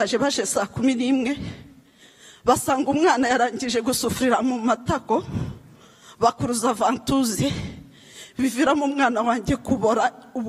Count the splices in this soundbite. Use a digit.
0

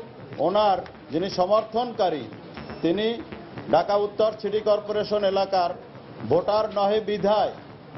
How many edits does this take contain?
1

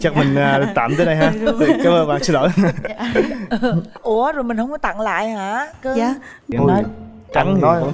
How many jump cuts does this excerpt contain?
1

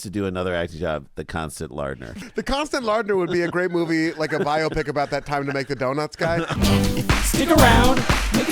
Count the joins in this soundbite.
2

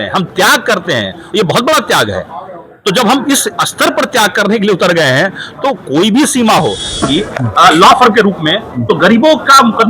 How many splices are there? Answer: 1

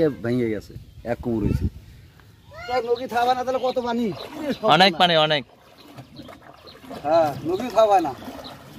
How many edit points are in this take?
1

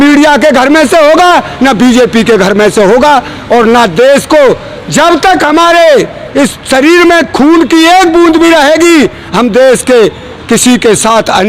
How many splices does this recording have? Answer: 0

